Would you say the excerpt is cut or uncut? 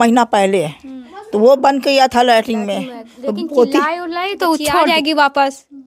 cut